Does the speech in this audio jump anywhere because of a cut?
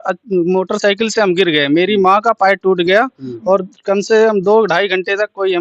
no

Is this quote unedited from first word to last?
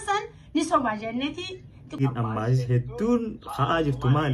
no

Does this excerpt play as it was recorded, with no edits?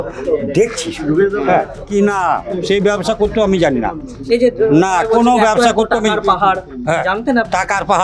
no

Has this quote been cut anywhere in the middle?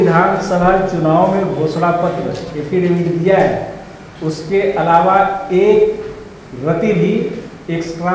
no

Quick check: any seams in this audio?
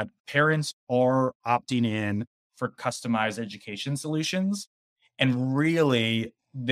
no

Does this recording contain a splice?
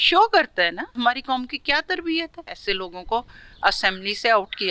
yes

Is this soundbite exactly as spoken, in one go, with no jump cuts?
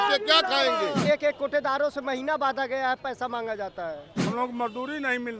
no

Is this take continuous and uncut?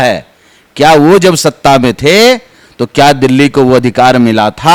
yes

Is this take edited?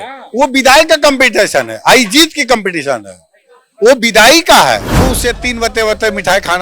yes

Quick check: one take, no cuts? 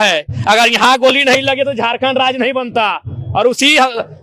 yes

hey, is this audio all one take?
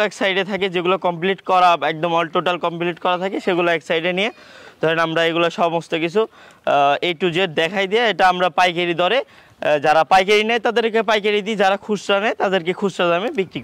yes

